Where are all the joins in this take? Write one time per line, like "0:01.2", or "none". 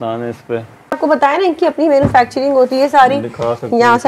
0:01.0